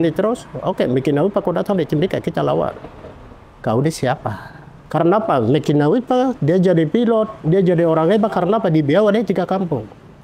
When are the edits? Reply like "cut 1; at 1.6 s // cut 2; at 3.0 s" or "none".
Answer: cut 1; at 4.8 s